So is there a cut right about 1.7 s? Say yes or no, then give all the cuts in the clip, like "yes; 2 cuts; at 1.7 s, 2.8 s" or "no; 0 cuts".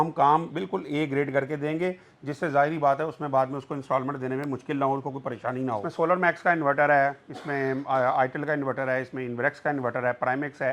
no; 1 cut; at 5.9 s